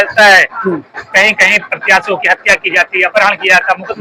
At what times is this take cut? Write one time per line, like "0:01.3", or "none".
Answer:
none